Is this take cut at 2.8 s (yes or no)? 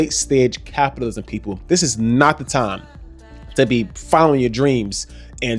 no